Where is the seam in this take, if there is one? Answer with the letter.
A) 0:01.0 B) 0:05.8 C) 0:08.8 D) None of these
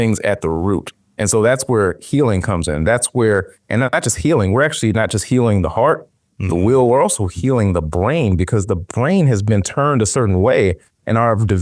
A